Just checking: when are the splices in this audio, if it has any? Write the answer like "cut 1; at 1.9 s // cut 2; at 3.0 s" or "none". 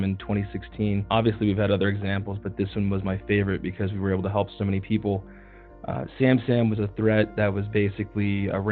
cut 1; at 1.1 s